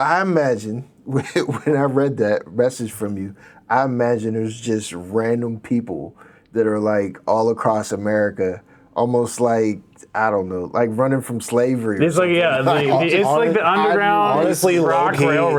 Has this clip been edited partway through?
no; 0 cuts

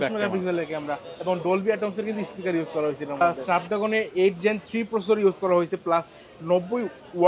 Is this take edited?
yes; 1 cut; at 3.2 s

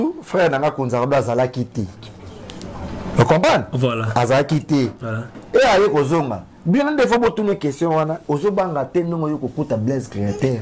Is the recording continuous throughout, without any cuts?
yes; 0 cuts

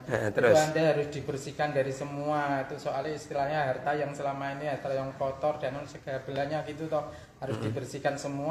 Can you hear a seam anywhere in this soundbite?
no; 0 cuts

